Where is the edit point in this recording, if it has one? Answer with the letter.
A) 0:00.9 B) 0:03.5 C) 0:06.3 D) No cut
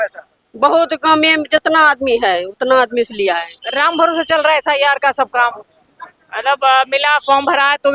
B